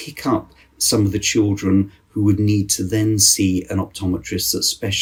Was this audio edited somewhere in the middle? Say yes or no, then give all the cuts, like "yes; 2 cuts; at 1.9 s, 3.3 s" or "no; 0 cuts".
no; 0 cuts